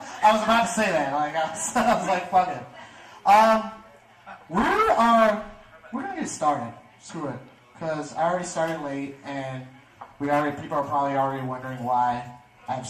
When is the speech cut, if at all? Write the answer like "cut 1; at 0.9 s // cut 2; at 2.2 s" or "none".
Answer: none